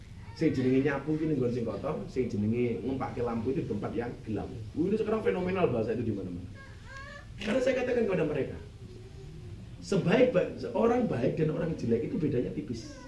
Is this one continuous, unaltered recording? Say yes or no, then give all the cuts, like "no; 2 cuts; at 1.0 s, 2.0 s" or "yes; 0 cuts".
yes; 0 cuts